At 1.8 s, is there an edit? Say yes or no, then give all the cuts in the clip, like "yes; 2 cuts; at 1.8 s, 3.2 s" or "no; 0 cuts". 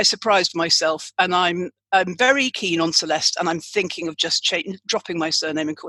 no; 0 cuts